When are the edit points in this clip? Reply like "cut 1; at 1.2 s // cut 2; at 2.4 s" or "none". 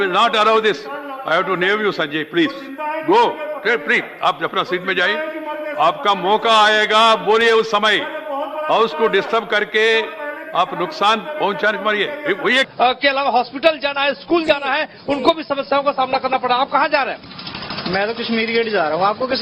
cut 1; at 12.7 s